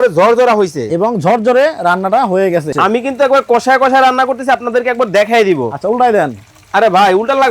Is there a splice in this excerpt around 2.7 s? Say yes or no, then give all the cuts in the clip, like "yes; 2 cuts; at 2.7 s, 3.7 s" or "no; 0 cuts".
yes; 1 cut; at 2.7 s